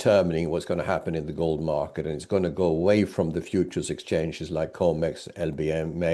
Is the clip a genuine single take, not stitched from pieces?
yes; 0 cuts

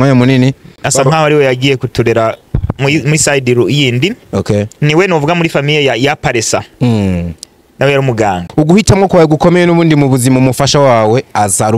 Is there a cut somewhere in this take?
yes; 1 cut; at 8.5 s

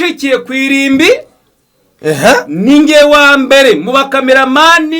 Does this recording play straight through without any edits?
yes; 0 cuts

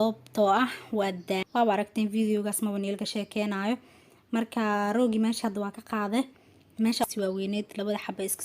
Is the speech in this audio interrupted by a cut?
yes; 2 cuts; at 1.4 s, 7.0 s

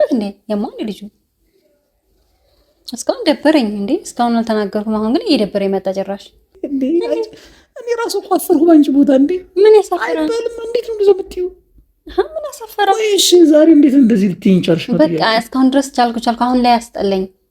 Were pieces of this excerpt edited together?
yes; 1 cut; at 6.6 s

